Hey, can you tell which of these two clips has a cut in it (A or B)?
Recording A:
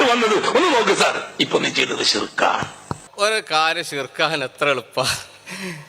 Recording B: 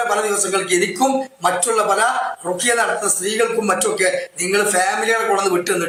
A